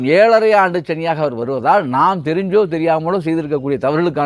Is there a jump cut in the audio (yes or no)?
no